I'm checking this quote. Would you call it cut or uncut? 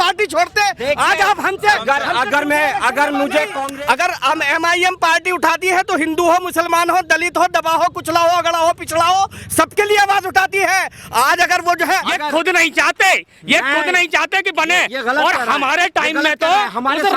cut